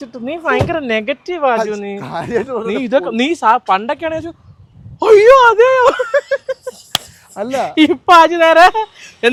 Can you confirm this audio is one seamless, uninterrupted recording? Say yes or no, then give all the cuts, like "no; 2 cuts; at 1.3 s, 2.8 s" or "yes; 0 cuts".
yes; 0 cuts